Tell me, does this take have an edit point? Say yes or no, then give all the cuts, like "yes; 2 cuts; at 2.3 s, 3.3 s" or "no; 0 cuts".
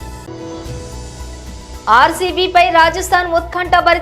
yes; 1 cut; at 0.9 s